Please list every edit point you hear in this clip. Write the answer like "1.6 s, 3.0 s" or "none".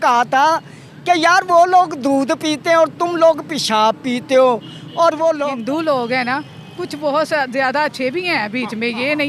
5.4 s